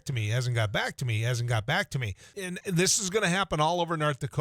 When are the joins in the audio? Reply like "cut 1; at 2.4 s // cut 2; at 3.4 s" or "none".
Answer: cut 1; at 2.3 s